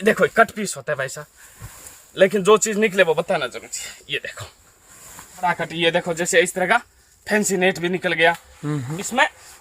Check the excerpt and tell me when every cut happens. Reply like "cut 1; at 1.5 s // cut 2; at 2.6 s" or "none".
cut 1; at 5.4 s